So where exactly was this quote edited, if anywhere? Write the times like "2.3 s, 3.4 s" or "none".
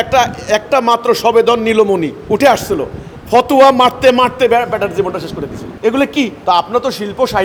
none